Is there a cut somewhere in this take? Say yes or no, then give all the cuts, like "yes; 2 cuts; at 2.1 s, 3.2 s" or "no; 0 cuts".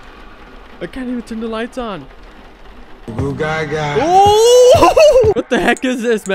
yes; 1 cut; at 5.4 s